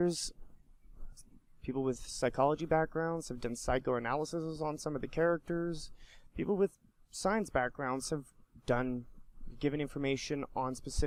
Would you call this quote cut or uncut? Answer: uncut